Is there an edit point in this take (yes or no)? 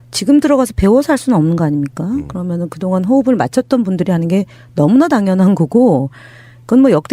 no